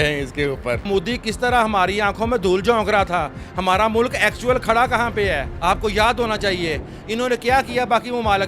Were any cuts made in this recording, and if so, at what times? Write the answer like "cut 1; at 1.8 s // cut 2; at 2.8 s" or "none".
cut 1; at 0.9 s // cut 2; at 5.5 s